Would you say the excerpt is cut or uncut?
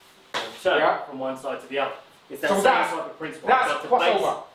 uncut